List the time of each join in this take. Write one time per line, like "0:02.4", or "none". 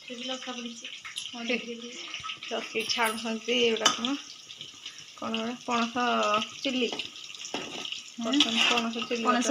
none